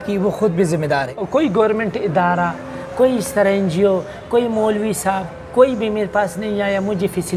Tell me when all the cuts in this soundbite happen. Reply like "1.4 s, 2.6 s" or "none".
1.2 s